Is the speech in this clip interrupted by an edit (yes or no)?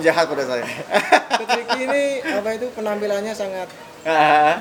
no